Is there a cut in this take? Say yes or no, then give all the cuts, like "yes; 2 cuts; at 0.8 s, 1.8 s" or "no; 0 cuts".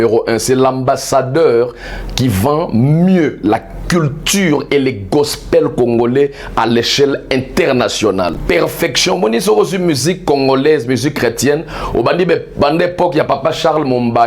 yes; 1 cut; at 8.4 s